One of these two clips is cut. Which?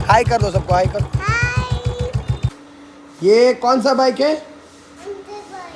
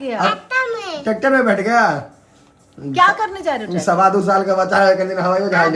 first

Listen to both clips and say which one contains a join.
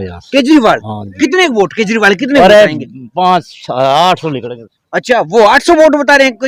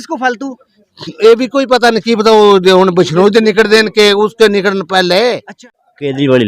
second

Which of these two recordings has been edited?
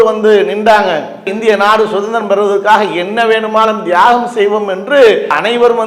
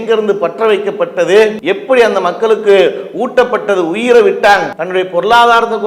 second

